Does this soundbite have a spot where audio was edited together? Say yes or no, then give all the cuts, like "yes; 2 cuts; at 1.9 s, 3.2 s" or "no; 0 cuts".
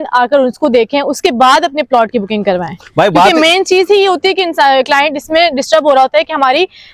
no; 0 cuts